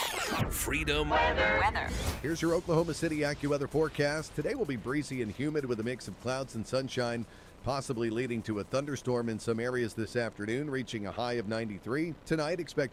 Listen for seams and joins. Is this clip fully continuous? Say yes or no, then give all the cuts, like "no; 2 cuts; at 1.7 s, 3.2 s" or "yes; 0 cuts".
yes; 0 cuts